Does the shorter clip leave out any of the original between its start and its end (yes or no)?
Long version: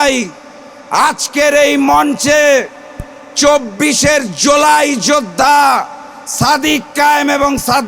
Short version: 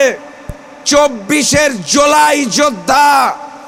no